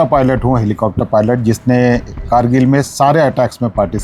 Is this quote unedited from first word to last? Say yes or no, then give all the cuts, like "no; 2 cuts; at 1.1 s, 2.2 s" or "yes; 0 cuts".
yes; 0 cuts